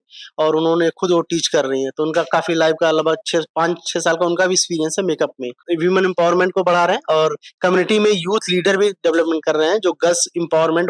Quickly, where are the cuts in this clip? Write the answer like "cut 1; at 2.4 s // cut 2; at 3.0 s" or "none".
cut 1; at 5.5 s